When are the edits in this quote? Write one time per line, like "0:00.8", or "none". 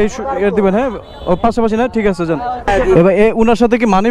0:02.7